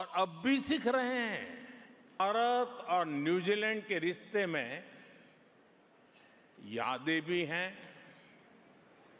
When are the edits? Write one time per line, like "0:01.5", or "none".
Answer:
0:02.2